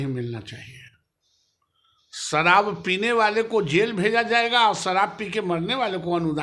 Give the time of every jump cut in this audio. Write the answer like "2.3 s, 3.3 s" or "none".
none